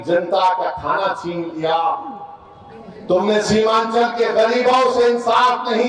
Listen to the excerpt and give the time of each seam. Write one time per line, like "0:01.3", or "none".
none